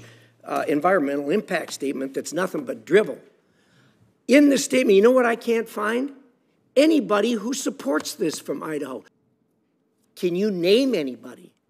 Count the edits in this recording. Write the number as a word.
one